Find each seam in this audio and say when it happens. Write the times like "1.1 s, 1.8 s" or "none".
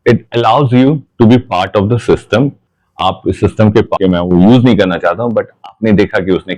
4.0 s